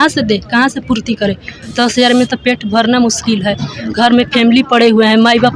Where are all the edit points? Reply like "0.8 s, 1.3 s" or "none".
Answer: none